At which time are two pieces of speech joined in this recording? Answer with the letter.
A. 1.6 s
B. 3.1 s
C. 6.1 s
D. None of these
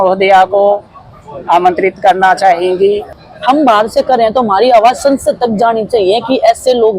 B